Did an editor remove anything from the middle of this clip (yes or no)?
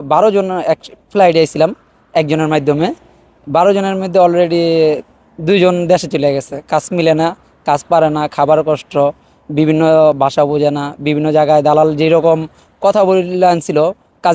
no